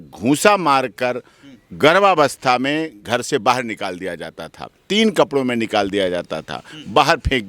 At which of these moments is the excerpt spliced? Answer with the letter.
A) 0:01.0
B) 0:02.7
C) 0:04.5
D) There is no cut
D